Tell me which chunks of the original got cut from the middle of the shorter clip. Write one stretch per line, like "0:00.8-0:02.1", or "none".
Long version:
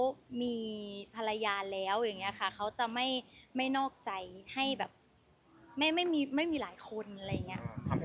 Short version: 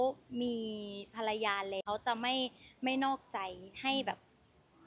0:01.8-0:02.5